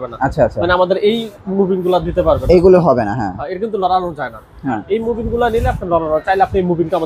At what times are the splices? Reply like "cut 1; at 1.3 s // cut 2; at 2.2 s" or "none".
none

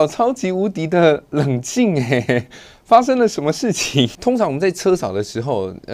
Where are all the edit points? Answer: cut 1; at 4.2 s

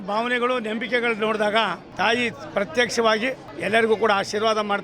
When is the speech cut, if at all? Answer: cut 1; at 1.8 s // cut 2; at 3.5 s

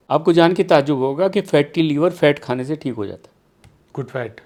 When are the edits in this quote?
none

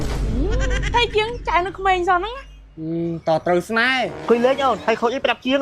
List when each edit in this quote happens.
cut 1; at 4.2 s

